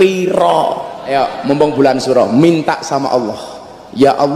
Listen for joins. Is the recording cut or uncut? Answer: cut